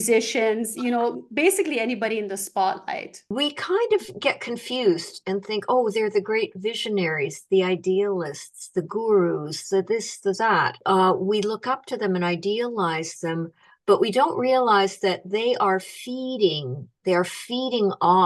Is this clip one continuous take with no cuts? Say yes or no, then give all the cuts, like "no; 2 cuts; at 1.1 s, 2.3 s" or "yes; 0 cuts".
no; 2 cuts; at 3.2 s, 10.8 s